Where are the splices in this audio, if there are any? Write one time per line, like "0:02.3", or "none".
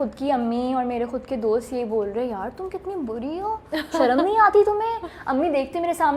none